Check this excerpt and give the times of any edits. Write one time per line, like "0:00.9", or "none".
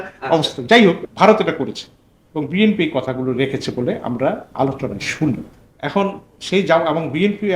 0:01.0
0:05.6